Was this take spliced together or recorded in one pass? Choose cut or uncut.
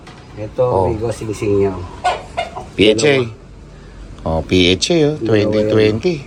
uncut